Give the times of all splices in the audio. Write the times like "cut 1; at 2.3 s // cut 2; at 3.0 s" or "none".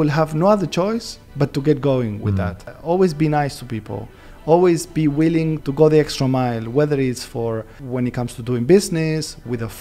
cut 1; at 2.7 s // cut 2; at 5.6 s // cut 3; at 7.8 s